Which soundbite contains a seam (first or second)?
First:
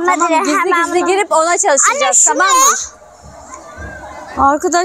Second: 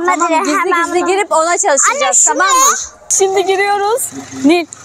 second